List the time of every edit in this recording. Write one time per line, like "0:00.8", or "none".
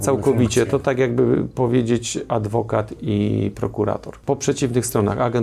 0:04.1